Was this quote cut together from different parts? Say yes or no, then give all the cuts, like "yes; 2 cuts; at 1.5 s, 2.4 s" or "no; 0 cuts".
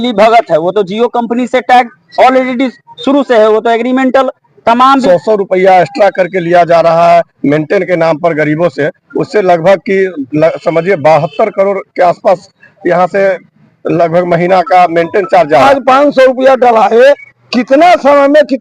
yes; 2 cuts; at 4.9 s, 15.6 s